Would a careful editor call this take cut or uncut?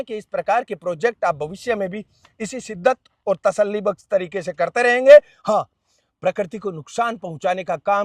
uncut